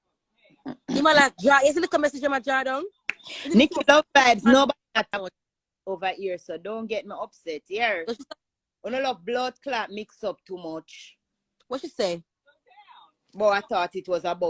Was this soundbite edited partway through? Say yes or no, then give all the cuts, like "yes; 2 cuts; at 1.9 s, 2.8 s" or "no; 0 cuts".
yes; 1 cut; at 5.1 s